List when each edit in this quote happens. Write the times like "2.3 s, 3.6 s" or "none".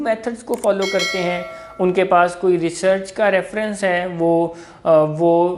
none